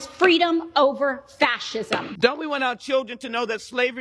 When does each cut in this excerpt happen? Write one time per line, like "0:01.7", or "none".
0:02.1